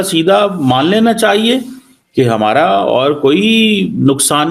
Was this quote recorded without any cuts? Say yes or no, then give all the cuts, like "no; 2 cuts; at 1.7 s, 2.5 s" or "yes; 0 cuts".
yes; 0 cuts